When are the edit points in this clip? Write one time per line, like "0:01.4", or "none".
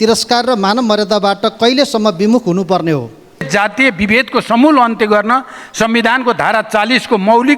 0:03.5